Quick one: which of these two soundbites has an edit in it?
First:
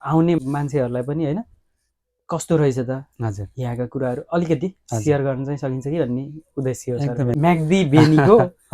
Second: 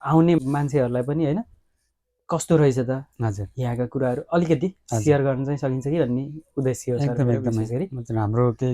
first; 1 cut; at 7.3 s

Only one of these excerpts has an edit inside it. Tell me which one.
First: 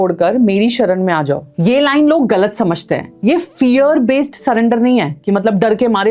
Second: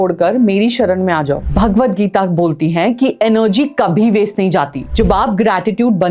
second; 2 cuts; at 1.4 s, 4.8 s

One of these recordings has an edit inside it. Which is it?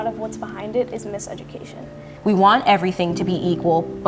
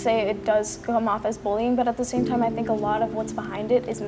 first; 1 cut; at 2.1 s

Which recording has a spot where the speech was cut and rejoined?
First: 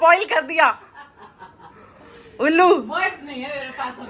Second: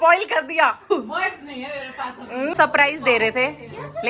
second; 1 cut; at 0.9 s

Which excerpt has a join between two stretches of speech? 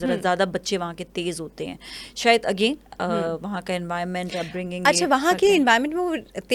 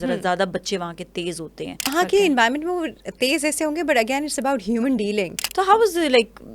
second; 2 cuts; at 1.9 s, 5.4 s

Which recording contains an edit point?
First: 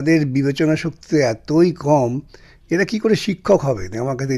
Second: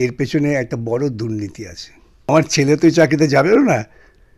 second; 1 cut; at 2.3 s

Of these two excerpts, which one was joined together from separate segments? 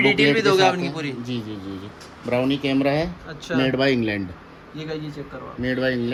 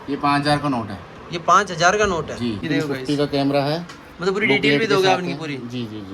second; 1 cut; at 2.6 s

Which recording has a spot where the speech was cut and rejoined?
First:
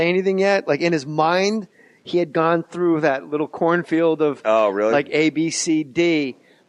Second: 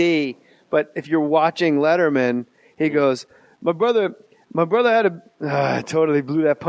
first; 1 cut; at 4.0 s

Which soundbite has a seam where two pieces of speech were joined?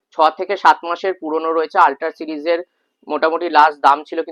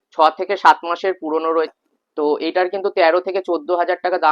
second; 1 cut; at 1.7 s

